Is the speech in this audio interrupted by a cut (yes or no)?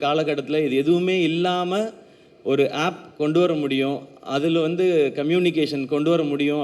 no